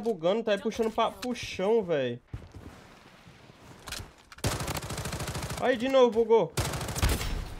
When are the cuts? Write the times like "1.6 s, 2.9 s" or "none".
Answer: 2.3 s